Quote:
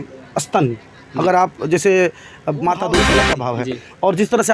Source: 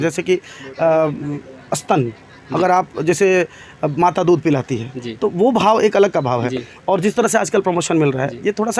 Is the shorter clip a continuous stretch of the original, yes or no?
no